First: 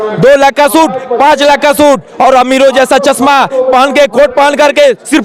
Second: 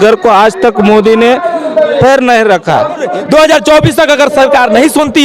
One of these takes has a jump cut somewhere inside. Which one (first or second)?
second